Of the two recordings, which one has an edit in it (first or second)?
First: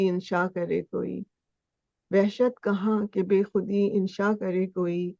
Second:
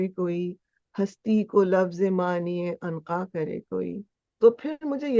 second